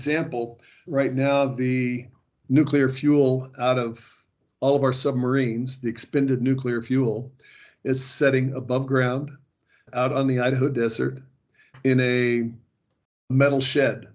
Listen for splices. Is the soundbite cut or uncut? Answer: uncut